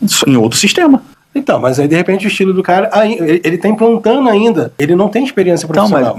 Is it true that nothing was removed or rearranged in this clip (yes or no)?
no